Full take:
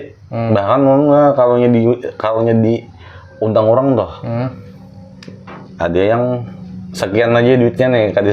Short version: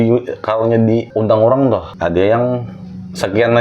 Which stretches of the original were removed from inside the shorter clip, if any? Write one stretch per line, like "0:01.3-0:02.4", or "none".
0:02.8-0:03.3
0:04.2-0:05.7